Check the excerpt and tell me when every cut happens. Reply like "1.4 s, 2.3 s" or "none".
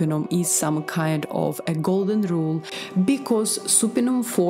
2.7 s